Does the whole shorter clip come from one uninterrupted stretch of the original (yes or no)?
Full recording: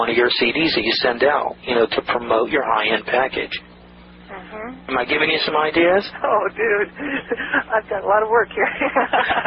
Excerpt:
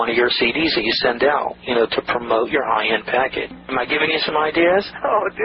no